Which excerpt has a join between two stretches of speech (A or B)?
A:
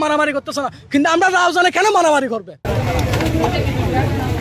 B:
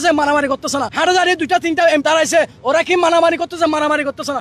B